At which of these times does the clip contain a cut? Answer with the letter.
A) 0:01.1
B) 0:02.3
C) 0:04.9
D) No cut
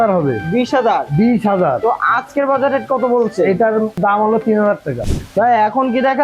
C